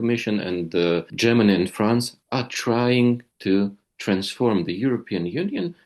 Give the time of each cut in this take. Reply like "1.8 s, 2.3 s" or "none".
1.1 s